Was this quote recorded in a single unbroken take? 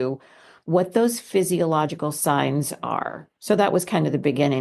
yes; 0 cuts

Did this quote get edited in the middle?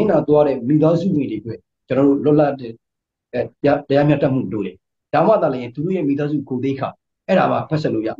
no; 0 cuts

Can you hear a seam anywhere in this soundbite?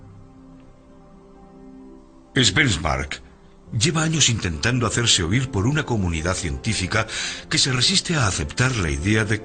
no; 0 cuts

